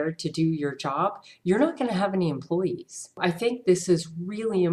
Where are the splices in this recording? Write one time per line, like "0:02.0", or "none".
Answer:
0:03.2